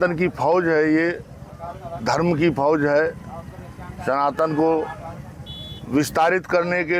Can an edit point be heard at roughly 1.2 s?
no; 0 cuts

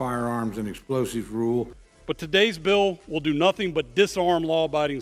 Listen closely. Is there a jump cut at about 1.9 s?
yes; 1 cut; at 1.9 s

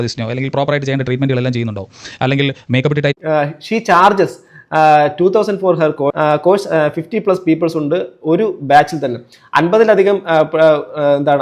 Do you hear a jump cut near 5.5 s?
no; 1 cut; at 3.1 s

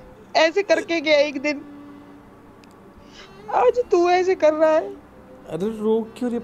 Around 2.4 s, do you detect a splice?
no; 0 cuts

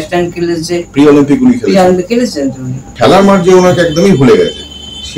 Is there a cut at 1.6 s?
no; 1 cut; at 2.9 s

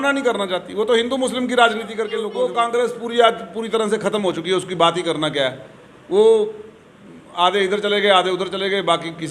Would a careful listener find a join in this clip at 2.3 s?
yes; 1 cut; at 2.3 s

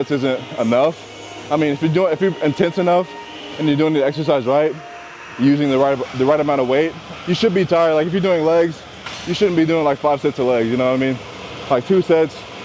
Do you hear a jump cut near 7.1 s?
yes; 1 cut; at 7.1 s

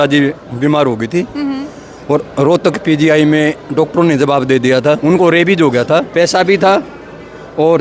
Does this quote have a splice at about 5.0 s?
yes; 2 cuts; at 5.0 s, 6.1 s

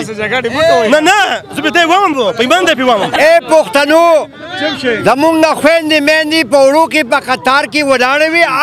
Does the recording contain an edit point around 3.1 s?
yes; 1 cut; at 3.1 s

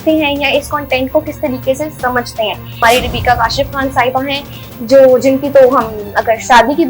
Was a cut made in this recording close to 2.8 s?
yes; 1 cut; at 2.8 s

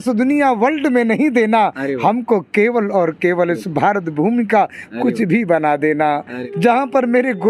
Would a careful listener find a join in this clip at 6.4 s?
yes; 1 cut; at 6.4 s

